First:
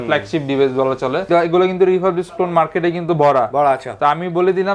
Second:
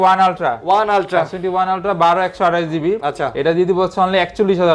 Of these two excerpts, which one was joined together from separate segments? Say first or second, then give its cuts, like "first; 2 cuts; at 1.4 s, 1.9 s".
first; 1 cut; at 1.2 s